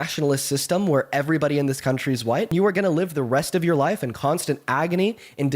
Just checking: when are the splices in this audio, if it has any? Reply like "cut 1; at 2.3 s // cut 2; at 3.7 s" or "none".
cut 1; at 2.5 s